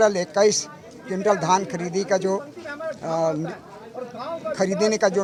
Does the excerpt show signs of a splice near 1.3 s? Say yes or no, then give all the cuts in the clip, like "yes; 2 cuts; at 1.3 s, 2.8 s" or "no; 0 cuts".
no; 0 cuts